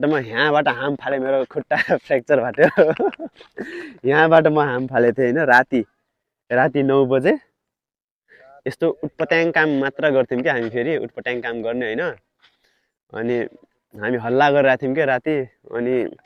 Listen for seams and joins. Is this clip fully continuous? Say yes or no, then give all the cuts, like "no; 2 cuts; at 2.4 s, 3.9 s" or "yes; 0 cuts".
yes; 0 cuts